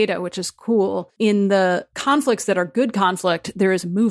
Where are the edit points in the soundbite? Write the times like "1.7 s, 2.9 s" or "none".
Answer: 1.1 s, 1.9 s